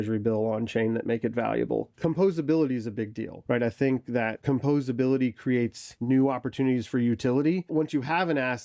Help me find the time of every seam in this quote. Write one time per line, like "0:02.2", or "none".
0:07.7